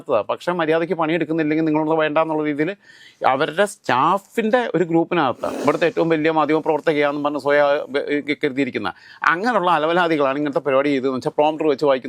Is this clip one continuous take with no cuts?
no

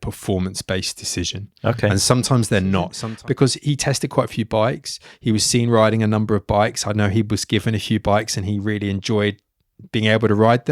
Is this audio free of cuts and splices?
no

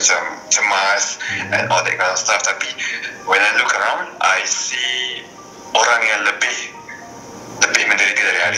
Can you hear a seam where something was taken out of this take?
no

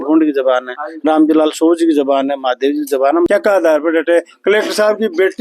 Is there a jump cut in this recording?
yes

